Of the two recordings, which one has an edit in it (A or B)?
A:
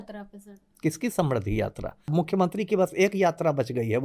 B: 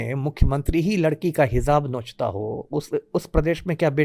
A